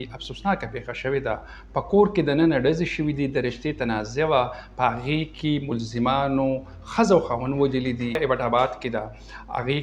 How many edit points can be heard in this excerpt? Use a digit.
1